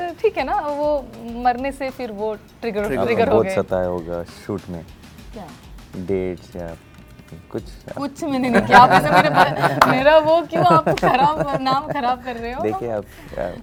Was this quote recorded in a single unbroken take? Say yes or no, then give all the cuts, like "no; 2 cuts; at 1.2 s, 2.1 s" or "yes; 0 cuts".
yes; 0 cuts